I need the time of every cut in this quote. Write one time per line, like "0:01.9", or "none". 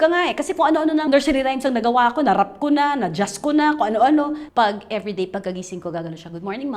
0:01.0
0:04.4